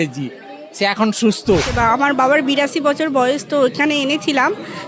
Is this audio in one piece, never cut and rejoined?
no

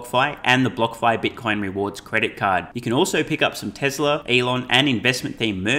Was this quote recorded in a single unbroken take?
no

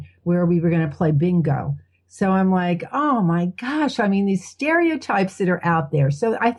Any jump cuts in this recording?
no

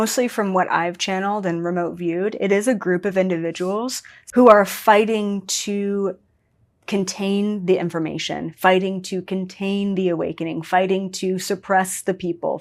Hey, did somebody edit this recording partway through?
no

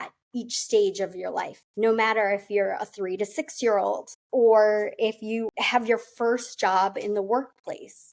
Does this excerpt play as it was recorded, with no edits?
no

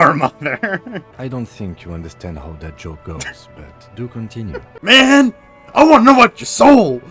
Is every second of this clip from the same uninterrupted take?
no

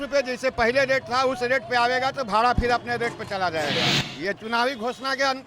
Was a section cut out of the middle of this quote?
yes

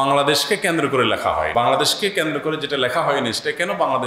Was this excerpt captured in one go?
no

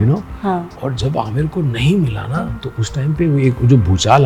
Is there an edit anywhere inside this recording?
no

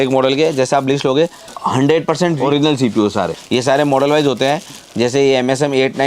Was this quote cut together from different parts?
yes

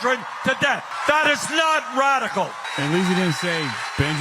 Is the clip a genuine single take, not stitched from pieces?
no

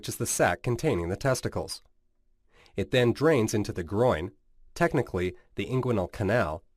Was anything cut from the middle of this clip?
no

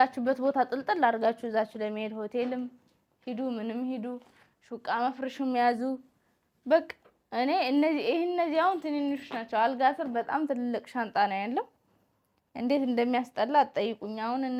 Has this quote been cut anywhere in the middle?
no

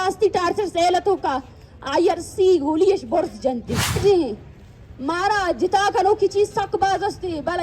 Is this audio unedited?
no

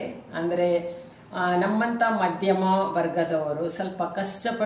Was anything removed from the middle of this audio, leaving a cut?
no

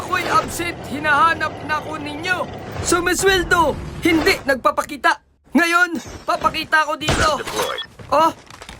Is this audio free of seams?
yes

